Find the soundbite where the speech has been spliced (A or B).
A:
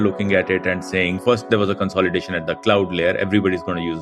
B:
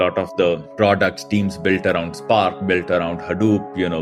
A